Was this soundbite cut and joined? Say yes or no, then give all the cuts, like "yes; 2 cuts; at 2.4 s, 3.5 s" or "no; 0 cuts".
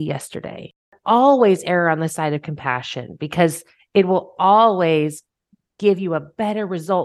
yes; 1 cut; at 0.9 s